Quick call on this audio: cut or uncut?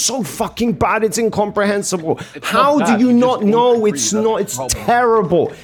uncut